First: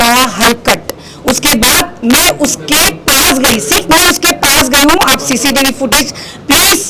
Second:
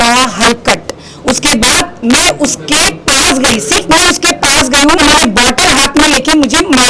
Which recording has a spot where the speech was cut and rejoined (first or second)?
second